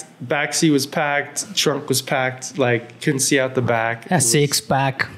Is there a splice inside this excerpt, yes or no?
no